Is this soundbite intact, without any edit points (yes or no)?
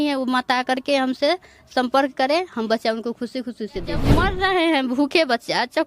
no